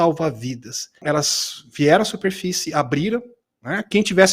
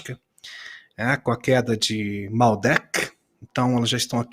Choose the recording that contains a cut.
first; 1 cut; at 1.0 s

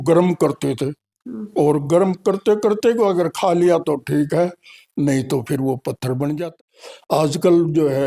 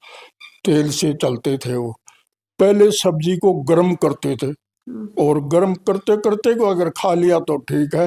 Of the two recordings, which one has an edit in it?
first; 1 cut; at 6.5 s

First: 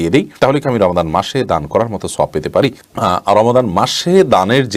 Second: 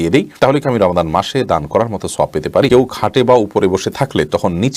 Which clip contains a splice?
second; 1 cut; at 2.7 s

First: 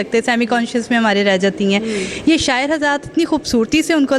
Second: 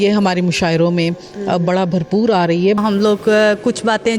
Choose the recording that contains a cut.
second; 1 cut; at 2.8 s

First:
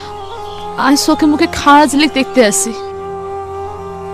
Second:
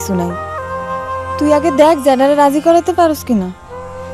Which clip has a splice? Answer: first; 1 cut; at 2.8 s

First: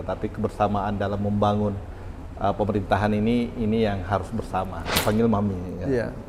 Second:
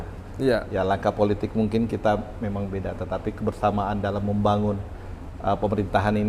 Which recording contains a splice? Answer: first; 1 cut; at 4.8 s

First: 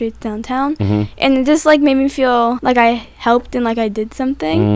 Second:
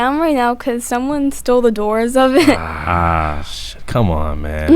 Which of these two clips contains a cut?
first; 1 cut; at 2.6 s

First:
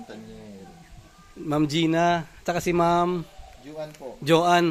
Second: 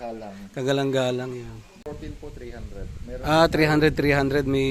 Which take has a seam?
second; 1 cut; at 1.9 s

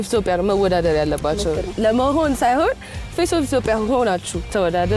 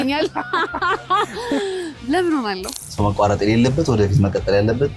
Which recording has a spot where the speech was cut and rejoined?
second; 1 cut; at 2.7 s

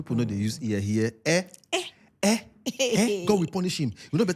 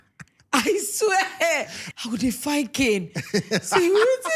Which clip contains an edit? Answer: second; 1 cut; at 1.8 s

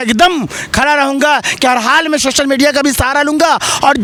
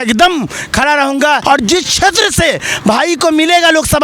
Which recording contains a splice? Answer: second; 1 cut; at 1.4 s

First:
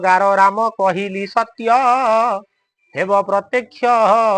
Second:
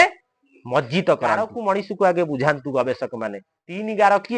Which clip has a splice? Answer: second; 1 cut; at 1.5 s

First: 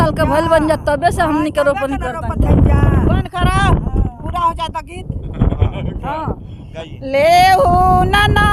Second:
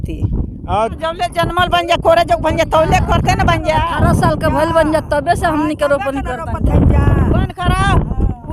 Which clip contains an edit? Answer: second; 1 cut; at 0.9 s

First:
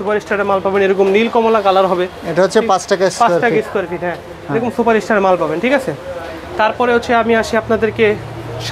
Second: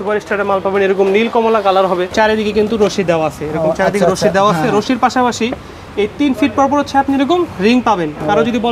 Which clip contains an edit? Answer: second; 1 cut; at 2.1 s

